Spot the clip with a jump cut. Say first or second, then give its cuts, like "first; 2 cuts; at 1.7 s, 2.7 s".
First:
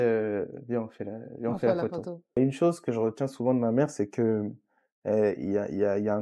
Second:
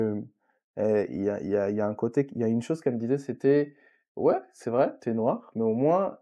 first; 1 cut; at 2.4 s